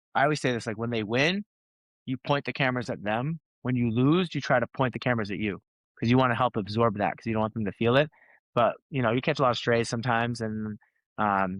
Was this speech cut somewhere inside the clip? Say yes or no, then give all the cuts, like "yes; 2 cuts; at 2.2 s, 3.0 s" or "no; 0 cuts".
no; 0 cuts